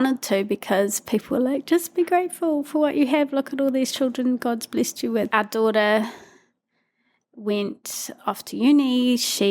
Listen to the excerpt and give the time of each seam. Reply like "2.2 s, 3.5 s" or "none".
5.3 s